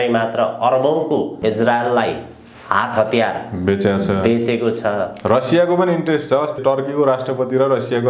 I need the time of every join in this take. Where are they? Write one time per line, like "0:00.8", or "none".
0:01.4
0:06.6